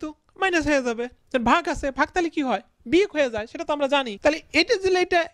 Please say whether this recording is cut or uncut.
cut